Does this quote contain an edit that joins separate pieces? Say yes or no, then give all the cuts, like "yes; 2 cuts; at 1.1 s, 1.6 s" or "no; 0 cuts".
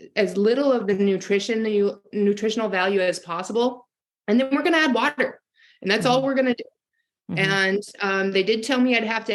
no; 0 cuts